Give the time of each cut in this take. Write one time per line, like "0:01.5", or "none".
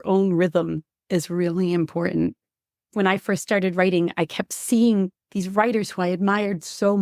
0:02.9